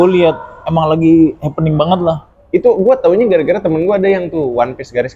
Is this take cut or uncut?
uncut